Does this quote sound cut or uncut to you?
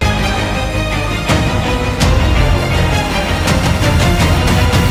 uncut